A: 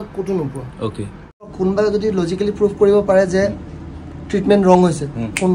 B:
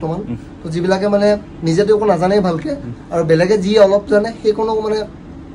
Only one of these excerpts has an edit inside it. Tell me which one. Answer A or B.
A